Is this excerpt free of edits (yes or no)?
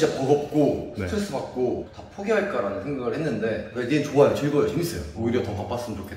no